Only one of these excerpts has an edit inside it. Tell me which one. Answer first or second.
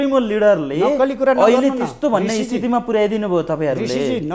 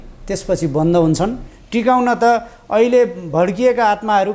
second